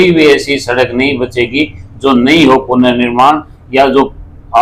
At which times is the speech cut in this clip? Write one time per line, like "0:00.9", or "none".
none